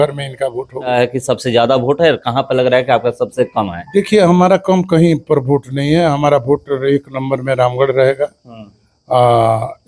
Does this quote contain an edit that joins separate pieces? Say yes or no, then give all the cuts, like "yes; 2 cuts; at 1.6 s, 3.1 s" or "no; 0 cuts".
yes; 1 cut; at 0.9 s